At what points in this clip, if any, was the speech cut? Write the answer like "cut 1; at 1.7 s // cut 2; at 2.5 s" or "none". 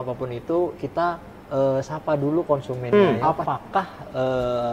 cut 1; at 2.9 s